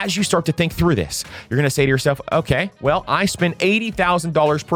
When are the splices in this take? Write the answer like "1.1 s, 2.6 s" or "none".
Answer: none